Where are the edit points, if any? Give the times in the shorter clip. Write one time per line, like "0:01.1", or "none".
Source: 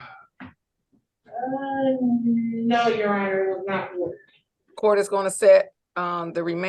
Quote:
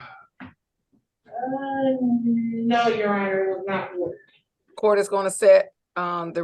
none

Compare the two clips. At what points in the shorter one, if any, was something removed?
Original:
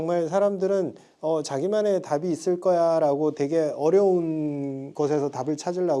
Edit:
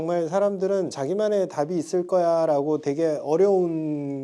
0:01.0

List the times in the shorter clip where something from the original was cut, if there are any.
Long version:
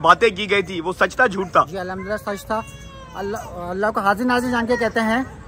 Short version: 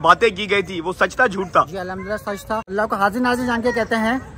0:02.7

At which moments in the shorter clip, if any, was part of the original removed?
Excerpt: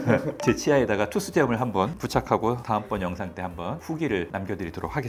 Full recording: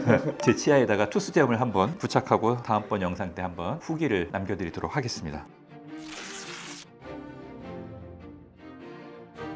none

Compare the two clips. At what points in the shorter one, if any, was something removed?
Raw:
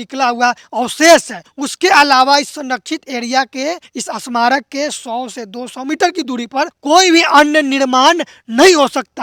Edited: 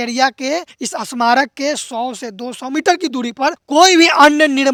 none

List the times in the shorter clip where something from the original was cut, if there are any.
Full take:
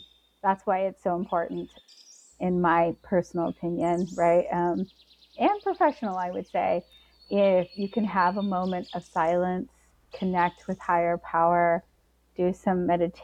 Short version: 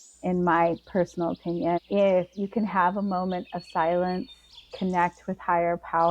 0:01.8

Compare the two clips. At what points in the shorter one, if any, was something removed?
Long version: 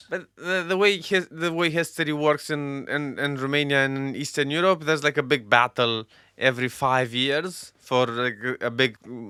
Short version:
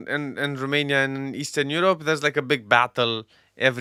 none

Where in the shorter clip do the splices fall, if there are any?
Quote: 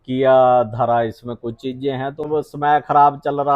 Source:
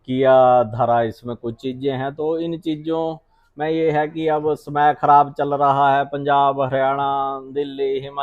0:02.2

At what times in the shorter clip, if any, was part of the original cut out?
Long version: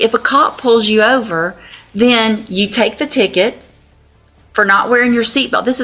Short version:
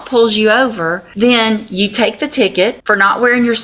0:01.0
0:02.8

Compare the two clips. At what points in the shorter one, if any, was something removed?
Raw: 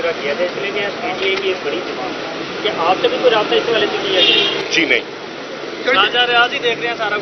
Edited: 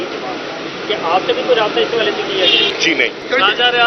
0:02.8

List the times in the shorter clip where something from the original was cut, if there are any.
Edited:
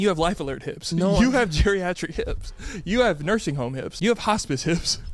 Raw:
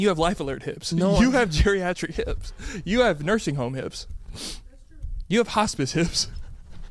0:03.9

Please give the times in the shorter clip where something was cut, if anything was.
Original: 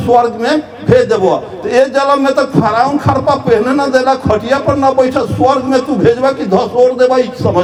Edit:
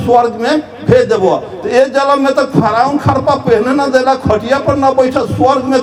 none

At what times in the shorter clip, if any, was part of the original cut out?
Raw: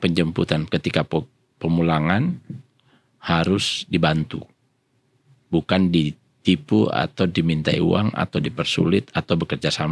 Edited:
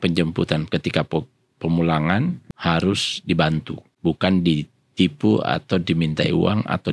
0:02.5
0:03.8

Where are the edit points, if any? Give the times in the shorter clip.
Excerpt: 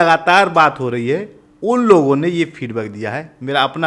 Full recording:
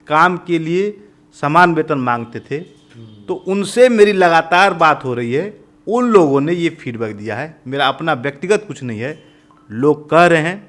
none

